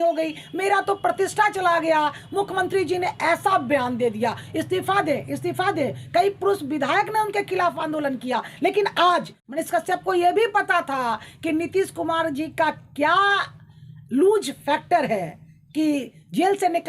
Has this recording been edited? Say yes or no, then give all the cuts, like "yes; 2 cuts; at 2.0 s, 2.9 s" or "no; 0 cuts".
yes; 1 cut; at 9.4 s